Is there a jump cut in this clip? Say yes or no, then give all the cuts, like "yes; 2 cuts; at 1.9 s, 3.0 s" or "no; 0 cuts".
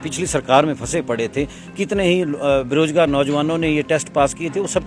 no; 0 cuts